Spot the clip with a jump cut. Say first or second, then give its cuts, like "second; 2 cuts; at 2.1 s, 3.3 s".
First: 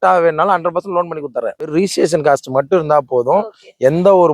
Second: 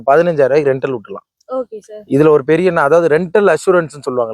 first; 1 cut; at 1.7 s